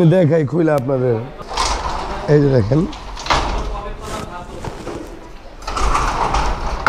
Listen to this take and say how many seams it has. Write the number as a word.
one